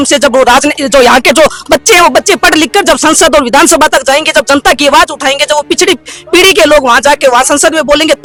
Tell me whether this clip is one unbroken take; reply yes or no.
yes